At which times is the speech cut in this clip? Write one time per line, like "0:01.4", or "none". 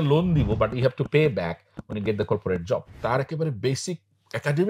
0:02.9